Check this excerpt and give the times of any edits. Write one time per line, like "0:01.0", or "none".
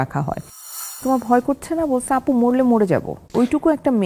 0:01.0
0:03.2